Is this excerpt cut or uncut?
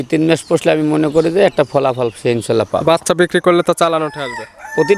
uncut